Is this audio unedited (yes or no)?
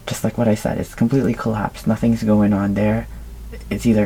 yes